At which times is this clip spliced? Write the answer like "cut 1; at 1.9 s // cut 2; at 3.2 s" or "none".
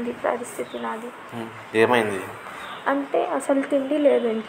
cut 1; at 1.1 s